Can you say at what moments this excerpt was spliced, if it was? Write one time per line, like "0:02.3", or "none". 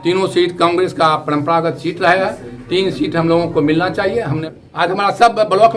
0:04.4